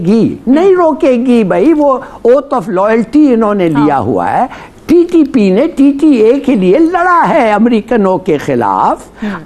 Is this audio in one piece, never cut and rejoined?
yes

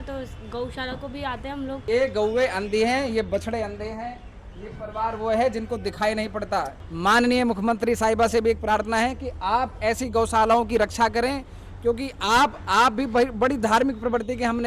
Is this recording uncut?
no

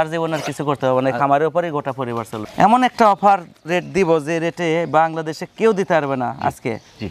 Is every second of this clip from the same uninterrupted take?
no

